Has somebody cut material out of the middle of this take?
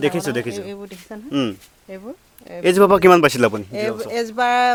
no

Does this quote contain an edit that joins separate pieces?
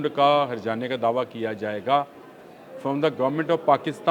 no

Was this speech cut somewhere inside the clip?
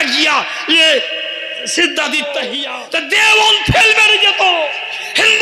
yes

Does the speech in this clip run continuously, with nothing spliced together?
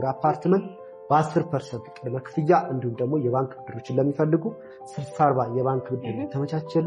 yes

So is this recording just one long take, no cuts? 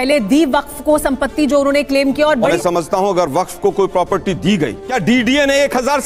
no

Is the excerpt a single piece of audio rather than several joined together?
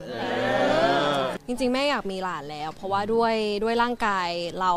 no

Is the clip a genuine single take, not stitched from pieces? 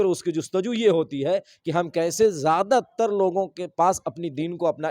yes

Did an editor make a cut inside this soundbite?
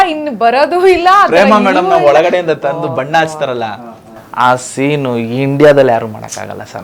no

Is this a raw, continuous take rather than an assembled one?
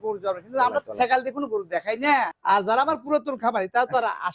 no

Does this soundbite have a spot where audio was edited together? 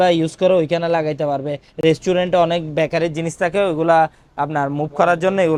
no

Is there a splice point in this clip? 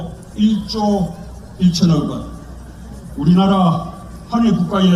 no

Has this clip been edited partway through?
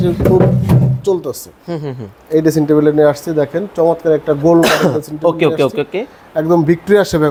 no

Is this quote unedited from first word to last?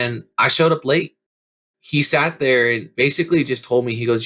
no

